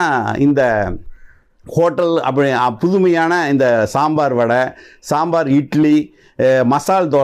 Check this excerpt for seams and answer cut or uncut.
uncut